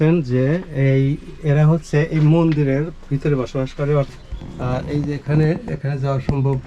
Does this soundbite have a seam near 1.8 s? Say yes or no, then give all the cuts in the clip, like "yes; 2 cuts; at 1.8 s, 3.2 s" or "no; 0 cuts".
no; 1 cut; at 4.1 s